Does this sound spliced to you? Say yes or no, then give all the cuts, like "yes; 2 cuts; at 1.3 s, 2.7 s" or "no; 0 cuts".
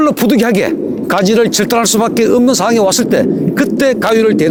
no; 0 cuts